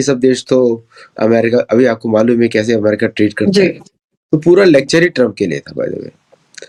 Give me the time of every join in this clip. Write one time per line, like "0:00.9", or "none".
none